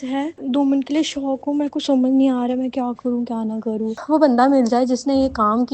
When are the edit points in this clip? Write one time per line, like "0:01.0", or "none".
0:03.9